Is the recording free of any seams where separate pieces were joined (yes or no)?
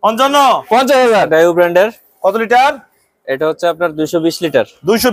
no